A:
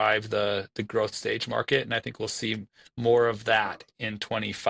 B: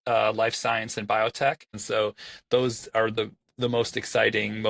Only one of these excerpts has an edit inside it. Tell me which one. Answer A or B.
B